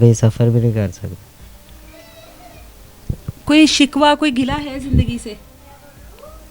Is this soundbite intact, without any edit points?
yes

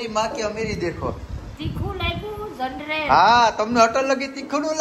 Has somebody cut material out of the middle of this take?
no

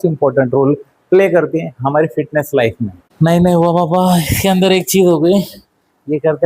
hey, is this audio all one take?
no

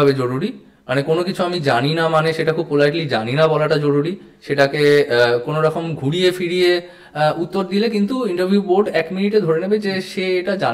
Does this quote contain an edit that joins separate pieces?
no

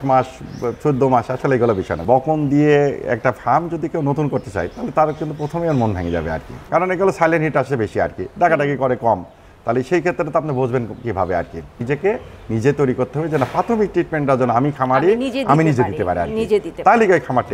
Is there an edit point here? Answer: yes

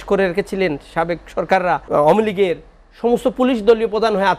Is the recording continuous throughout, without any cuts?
no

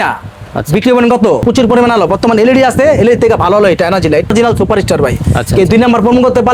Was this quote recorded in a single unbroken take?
no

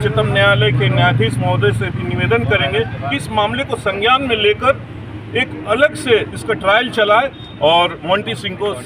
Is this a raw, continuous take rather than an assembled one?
yes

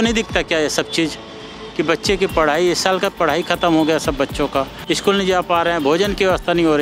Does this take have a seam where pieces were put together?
yes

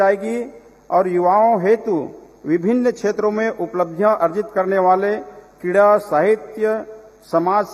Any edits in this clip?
no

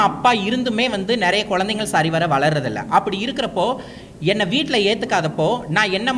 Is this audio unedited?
yes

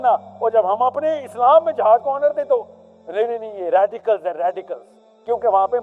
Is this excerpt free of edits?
yes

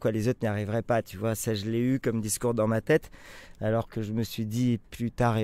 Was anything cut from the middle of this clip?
no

